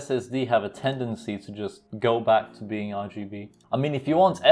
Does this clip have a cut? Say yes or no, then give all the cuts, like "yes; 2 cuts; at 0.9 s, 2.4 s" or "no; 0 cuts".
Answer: yes; 1 cut; at 1.8 s